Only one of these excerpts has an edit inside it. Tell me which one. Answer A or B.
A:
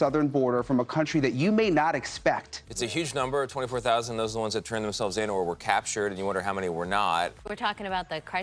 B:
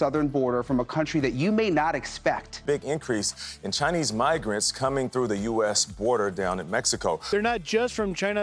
A